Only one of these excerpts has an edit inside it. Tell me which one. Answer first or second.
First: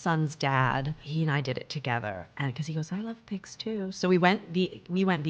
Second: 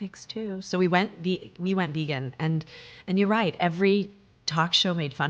first